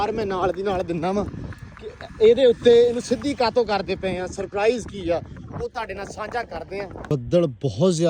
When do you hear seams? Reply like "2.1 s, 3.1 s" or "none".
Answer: 6.9 s